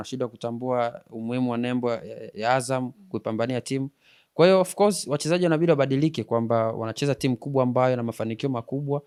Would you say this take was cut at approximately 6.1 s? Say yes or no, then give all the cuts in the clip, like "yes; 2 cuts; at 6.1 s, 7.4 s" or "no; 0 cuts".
no; 0 cuts